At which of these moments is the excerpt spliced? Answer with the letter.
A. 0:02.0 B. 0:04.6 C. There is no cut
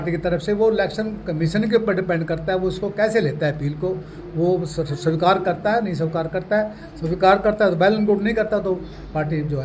C